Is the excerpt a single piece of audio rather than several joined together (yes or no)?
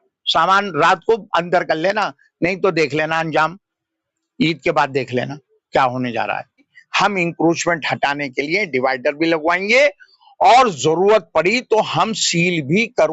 no